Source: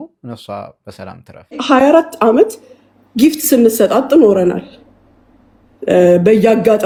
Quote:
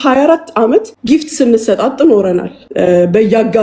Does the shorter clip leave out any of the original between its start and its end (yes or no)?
yes